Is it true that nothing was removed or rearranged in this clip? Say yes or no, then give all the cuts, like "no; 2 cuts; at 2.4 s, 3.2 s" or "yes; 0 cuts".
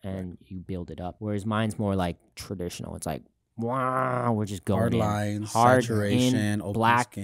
no; 1 cut; at 1.2 s